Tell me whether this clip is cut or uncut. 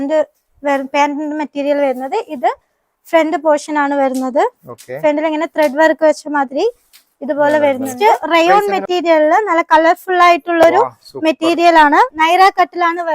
cut